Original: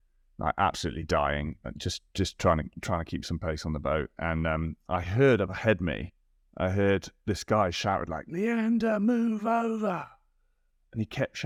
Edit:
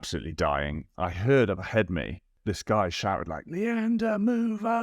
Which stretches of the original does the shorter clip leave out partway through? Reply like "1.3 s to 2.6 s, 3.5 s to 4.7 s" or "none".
1.6 s to 4.8 s, 6.2 s to 7.1 s

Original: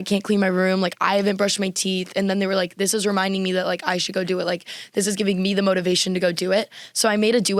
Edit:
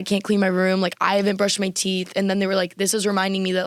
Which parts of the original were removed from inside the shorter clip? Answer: none

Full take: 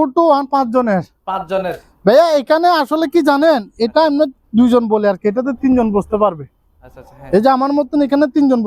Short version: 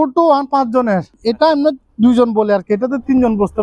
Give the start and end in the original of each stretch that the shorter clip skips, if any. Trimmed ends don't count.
1.2 s to 3.7 s

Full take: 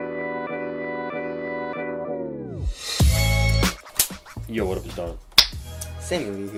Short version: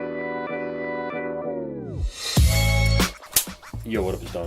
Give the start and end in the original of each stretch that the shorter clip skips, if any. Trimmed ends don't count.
1.2 s to 1.8 s

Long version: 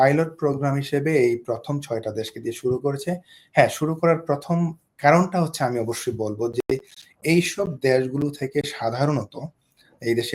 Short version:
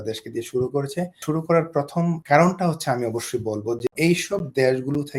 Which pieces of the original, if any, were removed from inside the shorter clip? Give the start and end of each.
3.3 s to 3.7 s, 4.7 s to 4.9 s, 6.7 s to 7.2 s

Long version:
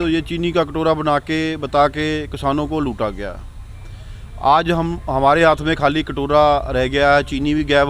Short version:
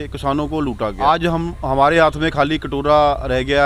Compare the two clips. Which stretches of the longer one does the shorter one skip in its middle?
3.1 s to 4.4 s

